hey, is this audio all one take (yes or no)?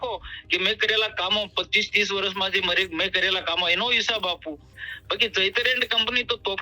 no